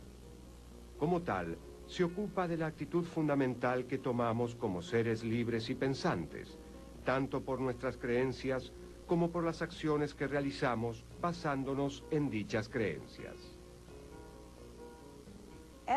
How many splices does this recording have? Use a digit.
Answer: 1